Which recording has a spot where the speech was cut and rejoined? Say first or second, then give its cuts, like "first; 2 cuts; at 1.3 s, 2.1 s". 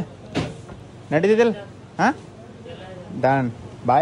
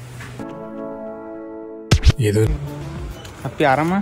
second; 1 cut; at 2.4 s